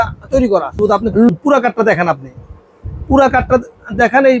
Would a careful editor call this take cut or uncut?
cut